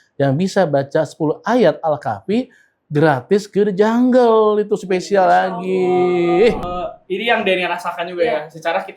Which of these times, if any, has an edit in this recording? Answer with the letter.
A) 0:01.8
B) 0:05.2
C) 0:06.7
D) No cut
C